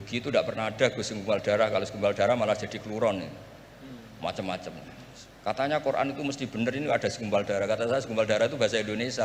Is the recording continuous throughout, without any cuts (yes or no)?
yes